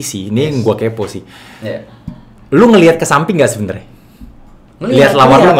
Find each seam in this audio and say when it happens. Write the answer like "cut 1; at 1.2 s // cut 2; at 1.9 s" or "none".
none